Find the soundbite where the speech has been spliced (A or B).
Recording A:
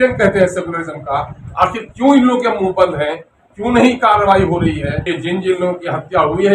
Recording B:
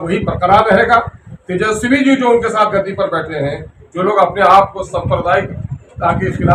A